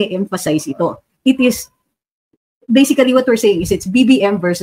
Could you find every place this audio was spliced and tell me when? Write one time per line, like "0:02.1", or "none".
none

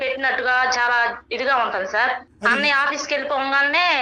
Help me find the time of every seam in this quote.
0:02.6

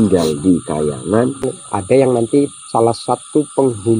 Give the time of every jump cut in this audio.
0:01.5

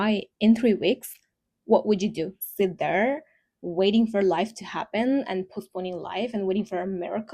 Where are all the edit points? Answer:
0:02.4

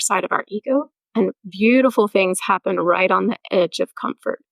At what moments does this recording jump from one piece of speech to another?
0:01.0

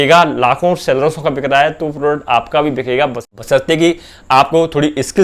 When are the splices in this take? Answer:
none

